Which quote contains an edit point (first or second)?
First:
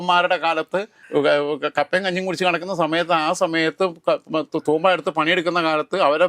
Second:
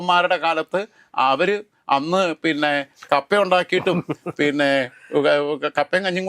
first